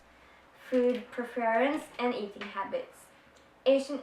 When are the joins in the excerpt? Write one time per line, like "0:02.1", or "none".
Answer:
0:01.0